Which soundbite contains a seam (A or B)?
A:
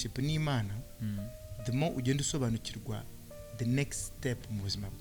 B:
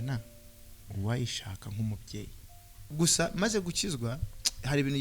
B